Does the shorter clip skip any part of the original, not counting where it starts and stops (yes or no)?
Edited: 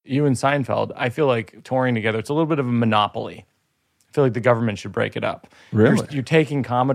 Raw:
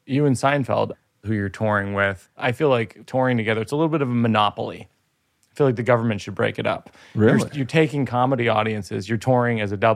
yes